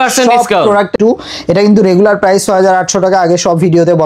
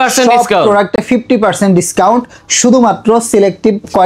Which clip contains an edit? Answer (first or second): first